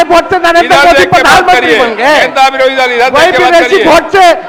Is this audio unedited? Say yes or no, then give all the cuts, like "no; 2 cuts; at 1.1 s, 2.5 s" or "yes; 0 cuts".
yes; 0 cuts